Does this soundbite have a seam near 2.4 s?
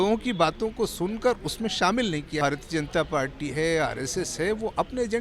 yes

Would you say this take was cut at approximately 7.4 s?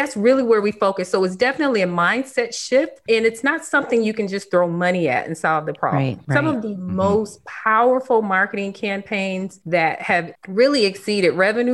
no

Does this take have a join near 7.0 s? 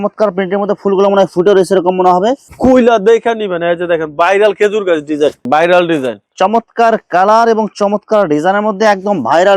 no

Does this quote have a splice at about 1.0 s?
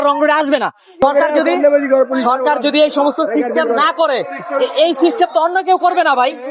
yes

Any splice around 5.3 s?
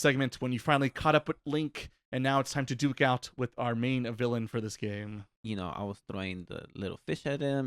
yes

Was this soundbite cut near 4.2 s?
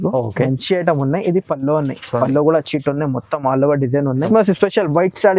yes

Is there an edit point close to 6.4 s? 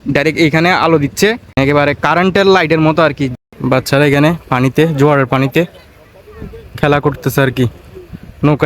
no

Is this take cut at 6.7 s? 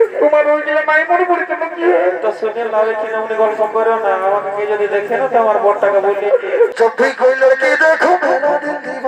yes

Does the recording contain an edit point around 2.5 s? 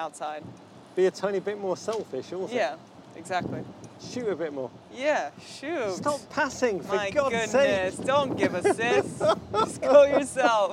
no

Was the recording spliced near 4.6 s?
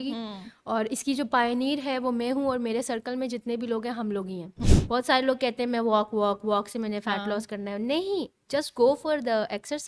yes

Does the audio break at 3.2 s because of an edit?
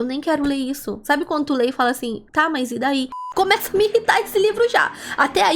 yes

